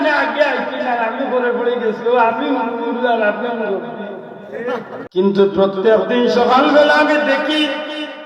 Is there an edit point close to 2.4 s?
no; 1 cut; at 5.0 s

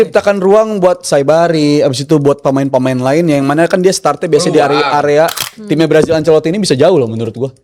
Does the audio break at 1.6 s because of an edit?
no; 1 cut; at 5.5 s

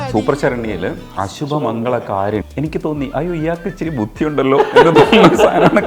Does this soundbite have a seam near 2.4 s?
yes; 2 cuts; at 1.0 s, 2.4 s

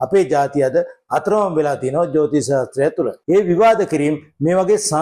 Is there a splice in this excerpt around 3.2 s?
yes; 1 cut; at 3.2 s

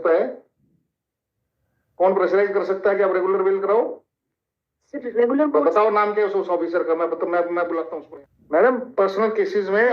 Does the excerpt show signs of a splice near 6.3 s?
no; 1 cut; at 8.0 s

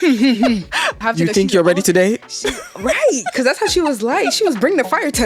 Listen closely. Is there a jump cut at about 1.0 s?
yes; 1 cut; at 1.0 s

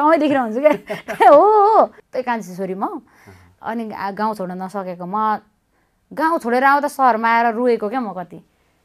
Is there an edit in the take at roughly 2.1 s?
yes; 1 cut; at 2.1 s

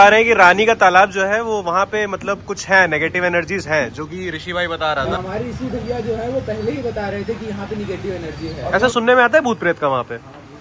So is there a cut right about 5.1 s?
yes; 2 cuts; at 5.1 s, 8.6 s

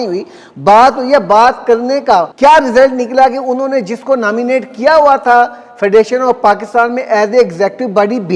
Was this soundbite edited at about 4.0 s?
no; 1 cut; at 2.3 s

